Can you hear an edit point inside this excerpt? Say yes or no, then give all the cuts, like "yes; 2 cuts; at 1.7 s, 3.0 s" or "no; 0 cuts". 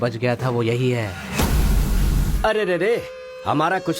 yes; 1 cut; at 2.3 s